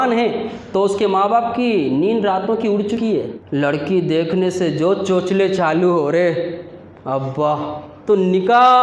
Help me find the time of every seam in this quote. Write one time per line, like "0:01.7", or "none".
0:03.4
0:07.9